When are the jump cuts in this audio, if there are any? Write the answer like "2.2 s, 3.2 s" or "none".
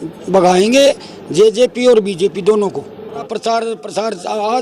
3.3 s